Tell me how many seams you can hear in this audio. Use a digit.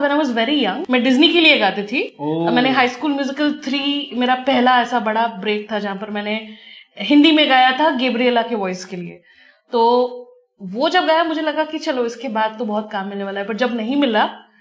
0